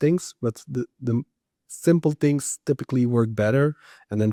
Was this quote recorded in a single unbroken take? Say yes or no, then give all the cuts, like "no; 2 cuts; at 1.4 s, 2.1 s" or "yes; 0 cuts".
yes; 0 cuts